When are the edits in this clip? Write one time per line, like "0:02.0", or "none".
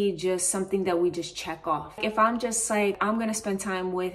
0:02.0
0:03.0